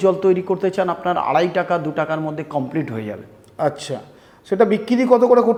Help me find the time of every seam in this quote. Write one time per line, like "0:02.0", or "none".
none